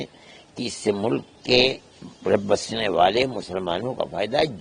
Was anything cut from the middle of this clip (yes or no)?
no